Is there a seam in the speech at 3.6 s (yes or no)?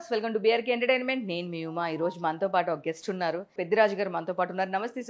yes